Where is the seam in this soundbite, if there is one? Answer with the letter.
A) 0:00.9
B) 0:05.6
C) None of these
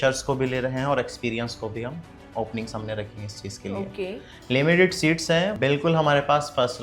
B